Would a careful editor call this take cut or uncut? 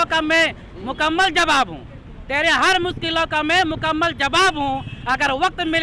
uncut